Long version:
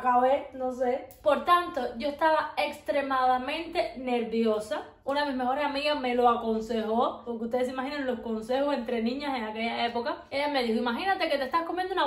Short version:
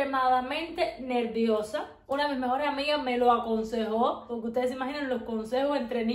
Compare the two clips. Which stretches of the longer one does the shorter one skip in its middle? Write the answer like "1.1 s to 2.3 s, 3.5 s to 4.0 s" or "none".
none